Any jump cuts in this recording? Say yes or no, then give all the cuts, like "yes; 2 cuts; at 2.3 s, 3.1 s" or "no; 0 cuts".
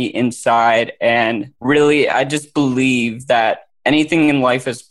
yes; 2 cuts; at 1.5 s, 3.7 s